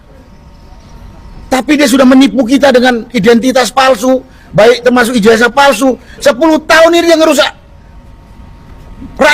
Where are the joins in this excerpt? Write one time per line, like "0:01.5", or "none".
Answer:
none